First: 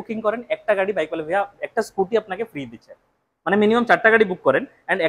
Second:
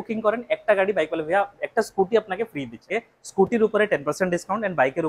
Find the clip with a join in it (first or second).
second